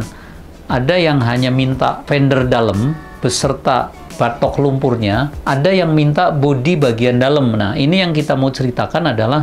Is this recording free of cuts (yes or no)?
yes